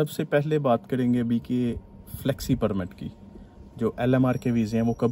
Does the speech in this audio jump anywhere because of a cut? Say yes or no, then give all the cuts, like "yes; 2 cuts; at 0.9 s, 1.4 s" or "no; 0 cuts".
no; 0 cuts